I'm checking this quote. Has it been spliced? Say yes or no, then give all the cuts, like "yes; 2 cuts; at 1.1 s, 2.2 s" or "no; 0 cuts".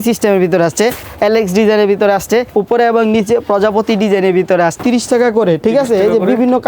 yes; 3 cuts; at 1.0 s, 2.5 s, 4.8 s